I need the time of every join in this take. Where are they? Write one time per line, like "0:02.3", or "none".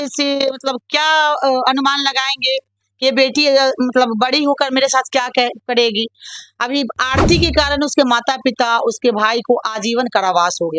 none